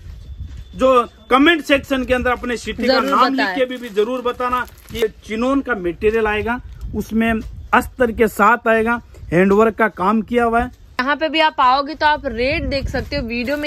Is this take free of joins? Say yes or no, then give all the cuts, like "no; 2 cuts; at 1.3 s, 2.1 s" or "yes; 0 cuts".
no; 2 cuts; at 5.0 s, 11.0 s